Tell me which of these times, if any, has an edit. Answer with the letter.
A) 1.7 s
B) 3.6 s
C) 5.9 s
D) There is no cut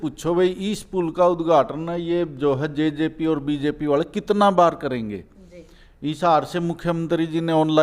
D